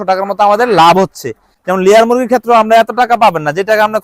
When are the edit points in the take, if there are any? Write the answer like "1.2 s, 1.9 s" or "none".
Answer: 1.4 s